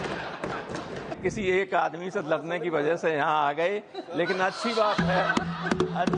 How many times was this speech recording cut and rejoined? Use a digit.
1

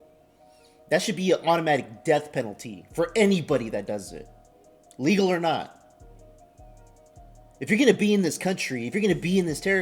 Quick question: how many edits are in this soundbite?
2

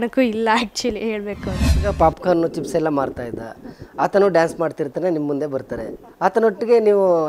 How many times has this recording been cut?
2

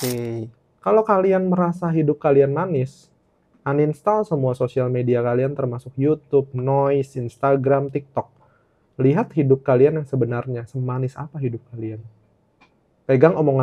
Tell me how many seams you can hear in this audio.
0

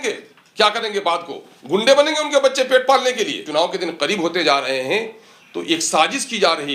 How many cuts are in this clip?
1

